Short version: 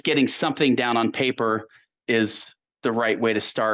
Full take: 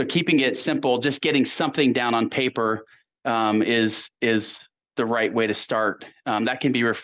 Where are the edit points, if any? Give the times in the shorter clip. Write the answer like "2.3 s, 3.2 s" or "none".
1.9 s